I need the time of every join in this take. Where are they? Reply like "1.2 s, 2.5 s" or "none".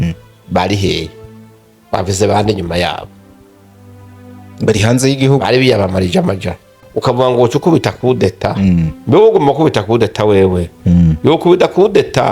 6.9 s